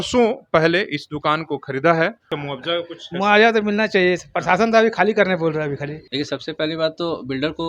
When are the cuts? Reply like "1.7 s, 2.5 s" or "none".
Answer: 2.4 s, 6.0 s